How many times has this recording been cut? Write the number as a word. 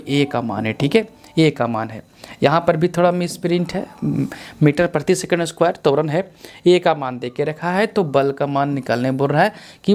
zero